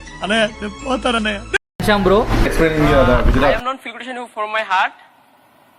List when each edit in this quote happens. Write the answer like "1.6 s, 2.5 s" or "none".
2.5 s